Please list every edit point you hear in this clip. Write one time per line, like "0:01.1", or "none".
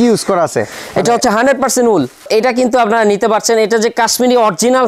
0:02.3